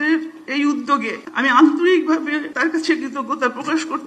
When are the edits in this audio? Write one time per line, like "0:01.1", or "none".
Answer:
0:01.2
0:02.5